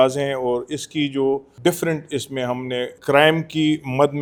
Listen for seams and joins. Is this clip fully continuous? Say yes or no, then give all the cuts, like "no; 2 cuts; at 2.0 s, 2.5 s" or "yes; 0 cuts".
yes; 0 cuts